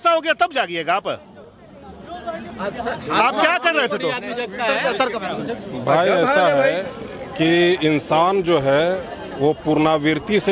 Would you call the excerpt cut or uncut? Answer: uncut